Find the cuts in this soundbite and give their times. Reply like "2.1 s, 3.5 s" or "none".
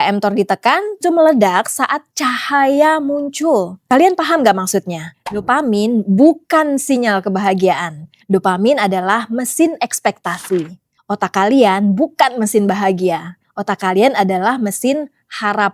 1.0 s